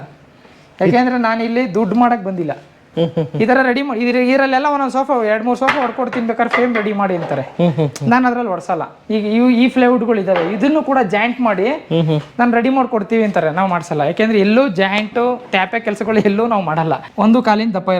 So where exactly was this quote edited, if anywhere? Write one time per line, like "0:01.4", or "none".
0:17.1

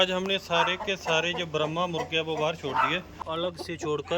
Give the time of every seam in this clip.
0:03.2

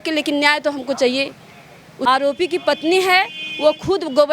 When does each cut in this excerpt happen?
0:02.1

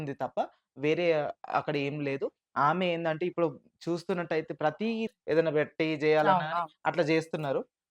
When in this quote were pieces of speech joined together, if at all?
0:05.1

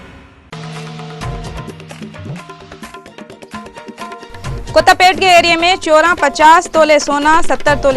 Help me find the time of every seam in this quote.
0:02.1
0:04.2

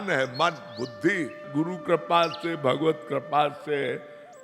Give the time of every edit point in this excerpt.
0:01.4

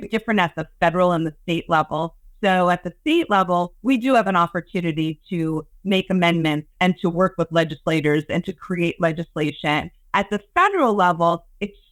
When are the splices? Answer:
none

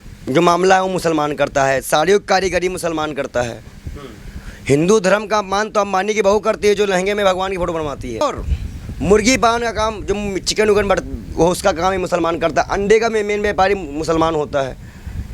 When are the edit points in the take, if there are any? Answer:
0:08.2

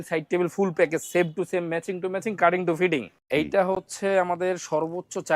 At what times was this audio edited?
0:03.6

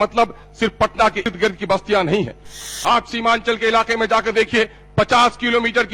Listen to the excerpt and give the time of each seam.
0:01.3
0:02.6

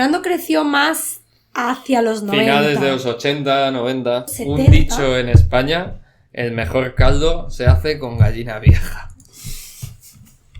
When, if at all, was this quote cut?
0:04.3

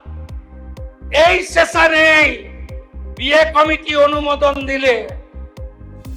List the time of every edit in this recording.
0:05.2

